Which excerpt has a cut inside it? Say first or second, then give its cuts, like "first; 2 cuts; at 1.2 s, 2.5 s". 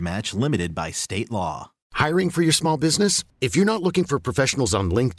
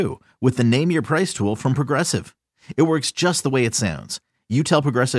first; 1 cut; at 1.9 s